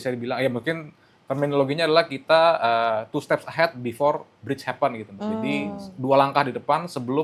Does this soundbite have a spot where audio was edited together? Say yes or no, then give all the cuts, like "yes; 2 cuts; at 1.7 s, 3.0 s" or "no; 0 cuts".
no; 0 cuts